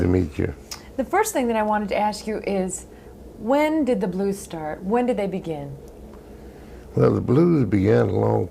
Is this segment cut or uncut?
cut